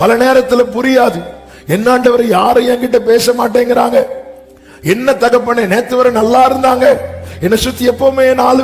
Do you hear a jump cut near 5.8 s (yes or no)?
no